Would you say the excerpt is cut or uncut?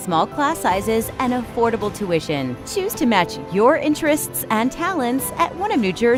uncut